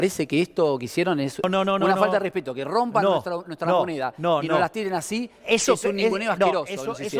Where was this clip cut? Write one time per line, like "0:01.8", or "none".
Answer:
0:01.5